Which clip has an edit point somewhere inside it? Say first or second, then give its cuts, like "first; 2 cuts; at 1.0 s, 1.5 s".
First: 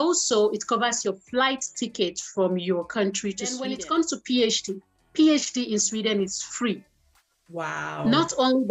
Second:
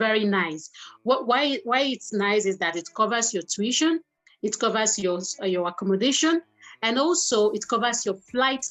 first; 1 cut; at 3.6 s